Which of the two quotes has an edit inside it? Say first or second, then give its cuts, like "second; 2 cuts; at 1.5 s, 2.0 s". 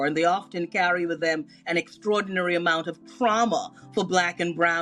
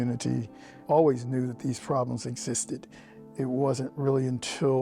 second; 2 cuts; at 0.8 s, 3.2 s